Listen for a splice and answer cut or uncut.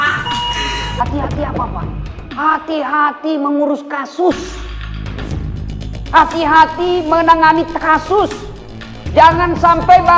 cut